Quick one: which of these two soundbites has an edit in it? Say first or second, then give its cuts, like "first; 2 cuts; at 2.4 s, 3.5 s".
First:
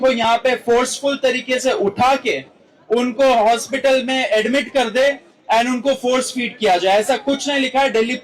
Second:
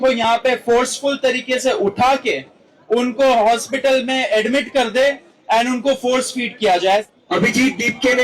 second; 1 cut; at 7.0 s